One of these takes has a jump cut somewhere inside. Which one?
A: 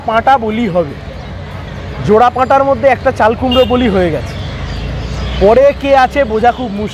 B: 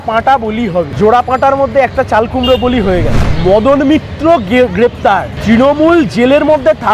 B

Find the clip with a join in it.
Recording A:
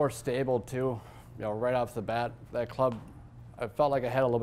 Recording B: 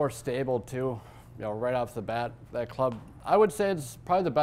B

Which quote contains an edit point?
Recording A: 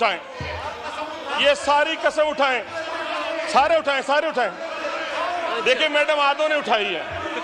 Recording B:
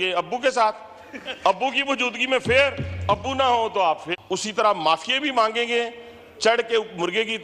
B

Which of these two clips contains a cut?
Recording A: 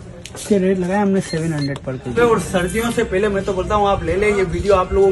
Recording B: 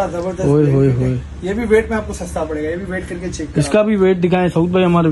A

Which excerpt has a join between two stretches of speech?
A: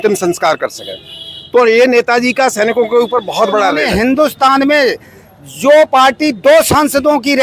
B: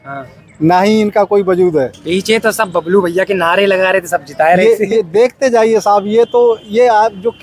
A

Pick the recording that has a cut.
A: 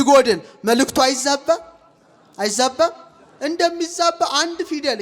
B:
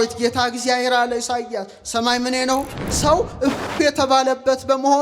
B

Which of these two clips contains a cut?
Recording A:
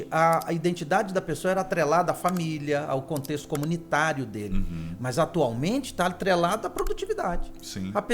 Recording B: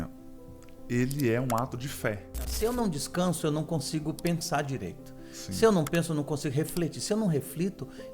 B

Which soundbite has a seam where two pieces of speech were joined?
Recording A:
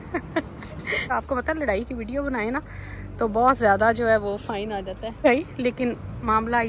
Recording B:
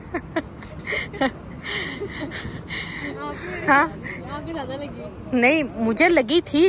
A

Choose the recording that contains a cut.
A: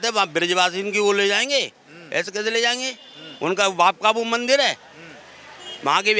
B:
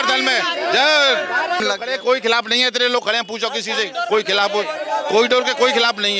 B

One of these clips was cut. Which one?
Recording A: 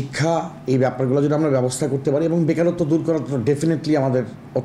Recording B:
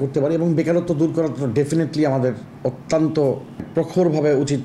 B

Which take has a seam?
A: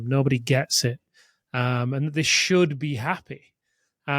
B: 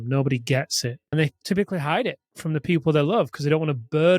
B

